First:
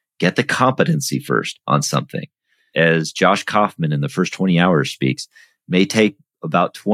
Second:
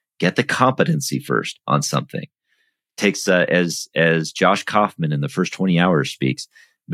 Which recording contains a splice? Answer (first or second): first